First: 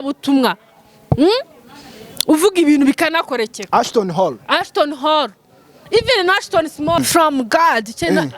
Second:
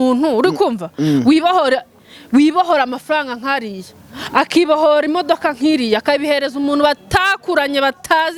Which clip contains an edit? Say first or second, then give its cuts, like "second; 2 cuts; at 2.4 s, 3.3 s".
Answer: first; 1 cut; at 7.0 s